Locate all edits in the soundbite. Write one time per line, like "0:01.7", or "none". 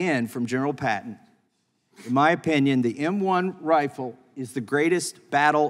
none